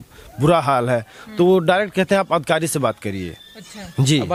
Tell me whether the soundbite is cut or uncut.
uncut